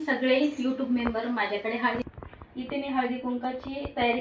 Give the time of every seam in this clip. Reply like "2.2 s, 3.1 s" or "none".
2.0 s